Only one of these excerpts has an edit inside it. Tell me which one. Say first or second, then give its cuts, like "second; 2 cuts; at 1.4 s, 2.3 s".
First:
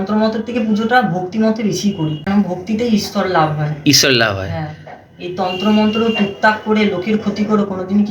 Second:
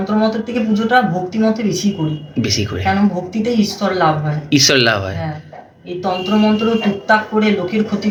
first; 1 cut; at 2.3 s